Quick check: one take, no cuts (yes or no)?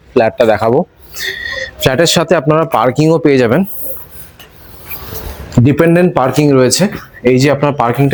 yes